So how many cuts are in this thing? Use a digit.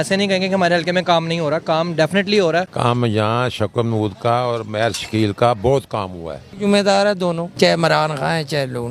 3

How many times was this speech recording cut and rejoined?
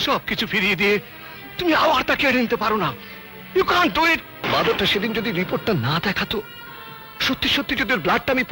1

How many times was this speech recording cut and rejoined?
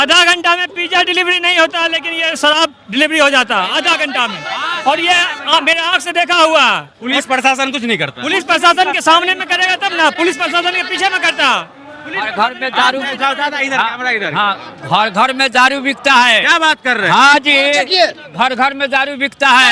0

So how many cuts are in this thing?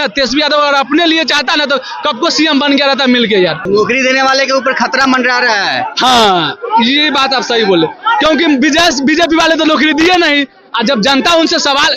1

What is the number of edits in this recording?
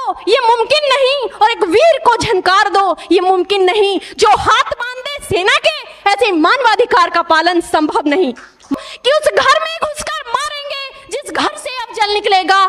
1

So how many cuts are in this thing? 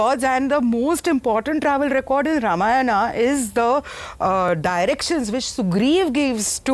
0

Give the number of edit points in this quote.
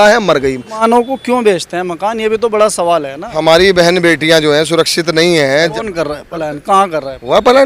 3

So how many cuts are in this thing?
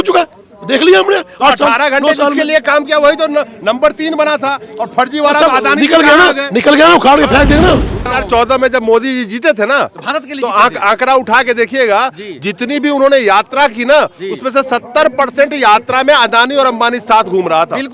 1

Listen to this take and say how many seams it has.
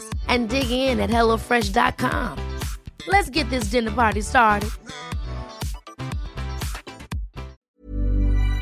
1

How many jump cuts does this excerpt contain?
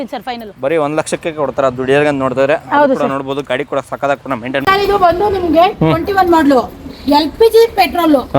1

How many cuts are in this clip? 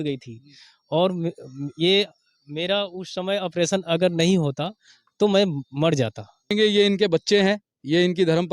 1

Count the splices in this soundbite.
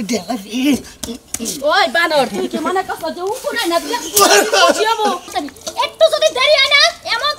1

